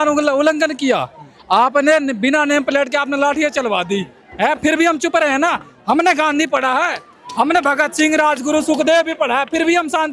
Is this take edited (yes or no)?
no